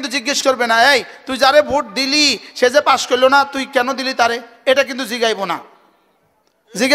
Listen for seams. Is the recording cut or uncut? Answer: uncut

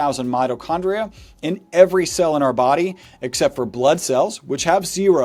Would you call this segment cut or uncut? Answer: uncut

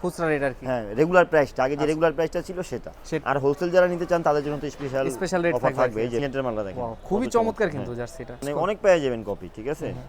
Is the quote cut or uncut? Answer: cut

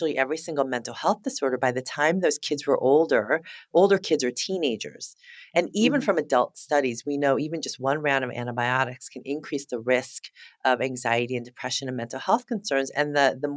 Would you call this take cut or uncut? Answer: uncut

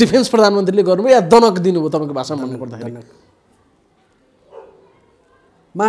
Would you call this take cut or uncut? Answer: uncut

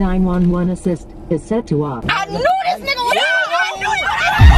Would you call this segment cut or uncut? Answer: cut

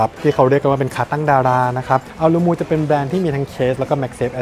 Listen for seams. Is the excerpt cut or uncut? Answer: cut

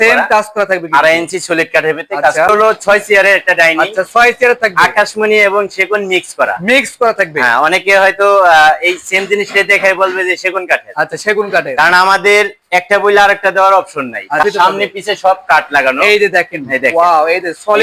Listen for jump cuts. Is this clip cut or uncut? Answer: cut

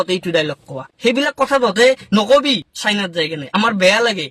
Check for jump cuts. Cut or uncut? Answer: cut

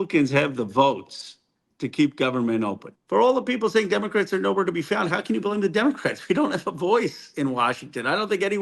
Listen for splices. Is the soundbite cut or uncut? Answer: cut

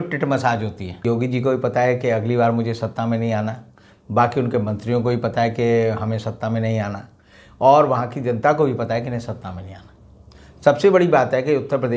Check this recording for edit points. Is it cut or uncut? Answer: cut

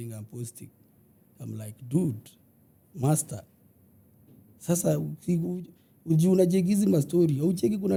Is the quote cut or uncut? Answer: uncut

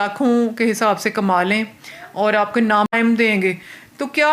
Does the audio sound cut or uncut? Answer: cut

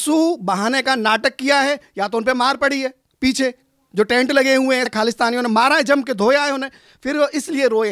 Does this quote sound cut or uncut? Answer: cut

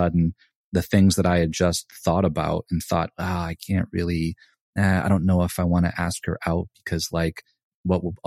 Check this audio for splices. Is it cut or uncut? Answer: uncut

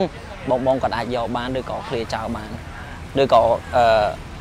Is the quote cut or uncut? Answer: uncut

